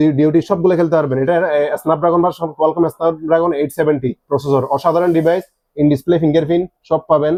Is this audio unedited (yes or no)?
yes